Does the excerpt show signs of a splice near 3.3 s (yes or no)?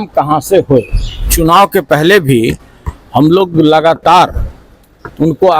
no